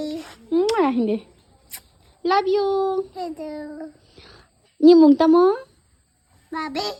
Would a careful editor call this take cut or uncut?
uncut